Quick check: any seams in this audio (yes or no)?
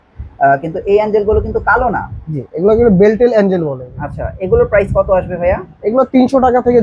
no